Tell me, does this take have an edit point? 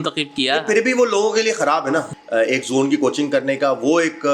yes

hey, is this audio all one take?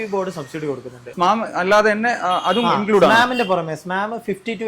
no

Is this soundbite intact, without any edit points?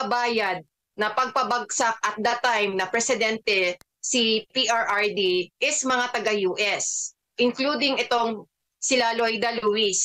yes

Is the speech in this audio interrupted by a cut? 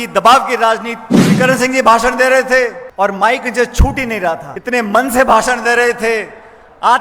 yes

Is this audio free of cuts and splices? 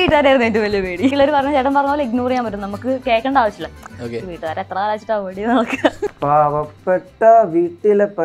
no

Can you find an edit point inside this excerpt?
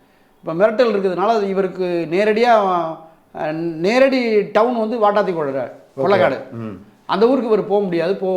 no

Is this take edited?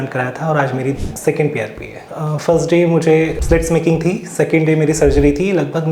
yes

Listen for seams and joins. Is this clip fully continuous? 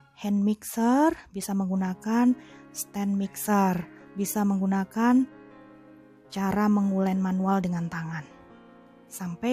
yes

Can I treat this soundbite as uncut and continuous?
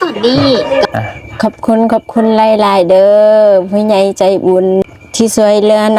no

